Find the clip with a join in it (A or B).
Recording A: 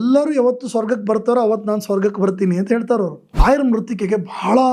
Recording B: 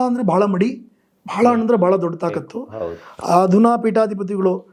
A